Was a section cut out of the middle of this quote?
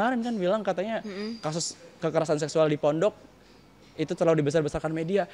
no; 0 cuts

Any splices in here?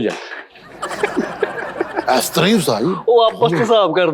no; 0 cuts

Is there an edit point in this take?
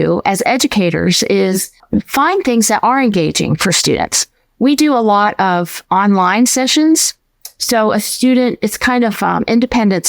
yes; 1 cut; at 1.7 s

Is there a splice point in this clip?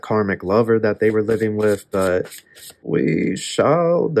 yes; 1 cut; at 2.8 s

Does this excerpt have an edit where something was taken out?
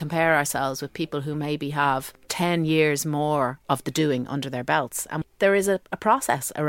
yes; 2 cuts; at 2.2 s, 5.2 s

